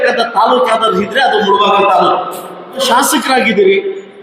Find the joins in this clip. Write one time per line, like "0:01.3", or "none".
0:02.8